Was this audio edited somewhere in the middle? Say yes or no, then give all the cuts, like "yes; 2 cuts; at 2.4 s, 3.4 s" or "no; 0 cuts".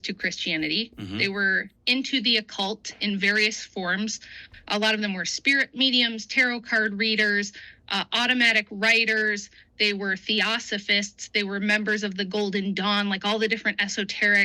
yes; 1 cut; at 1.7 s